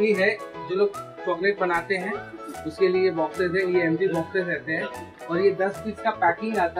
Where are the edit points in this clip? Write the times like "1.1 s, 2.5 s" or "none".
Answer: none